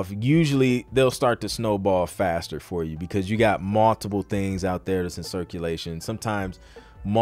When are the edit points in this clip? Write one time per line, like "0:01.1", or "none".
none